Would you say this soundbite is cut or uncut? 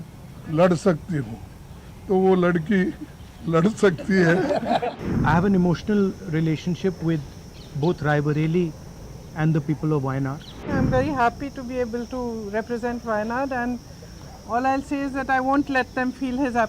cut